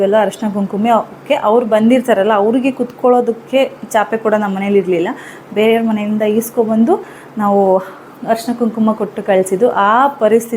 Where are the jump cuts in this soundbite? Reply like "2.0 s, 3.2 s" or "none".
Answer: none